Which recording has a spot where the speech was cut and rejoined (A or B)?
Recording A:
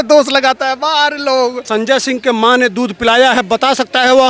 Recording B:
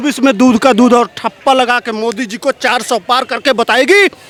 A